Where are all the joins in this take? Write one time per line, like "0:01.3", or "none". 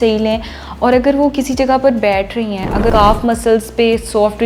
0:02.9